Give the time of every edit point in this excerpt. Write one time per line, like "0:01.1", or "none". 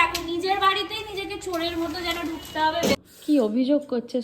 0:03.0